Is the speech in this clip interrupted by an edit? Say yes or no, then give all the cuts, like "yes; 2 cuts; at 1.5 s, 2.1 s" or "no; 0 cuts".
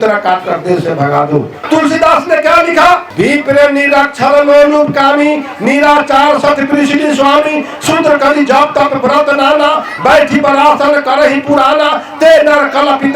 yes; 2 cuts; at 1.6 s, 3.1 s